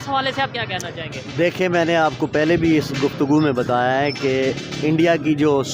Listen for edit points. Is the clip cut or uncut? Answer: uncut